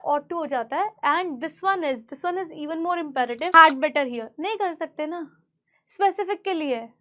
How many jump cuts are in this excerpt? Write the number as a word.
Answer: one